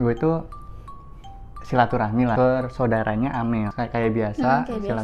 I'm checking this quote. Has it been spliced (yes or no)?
yes